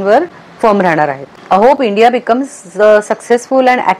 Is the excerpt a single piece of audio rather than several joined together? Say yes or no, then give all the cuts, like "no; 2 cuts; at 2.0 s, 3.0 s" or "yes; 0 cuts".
no; 1 cut; at 1.3 s